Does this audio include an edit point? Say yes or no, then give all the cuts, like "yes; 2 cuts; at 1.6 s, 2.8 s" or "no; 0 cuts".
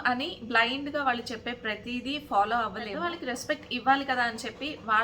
yes; 1 cut; at 2.9 s